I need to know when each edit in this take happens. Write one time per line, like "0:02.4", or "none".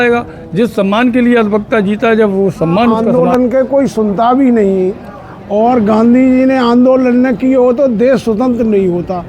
0:03.1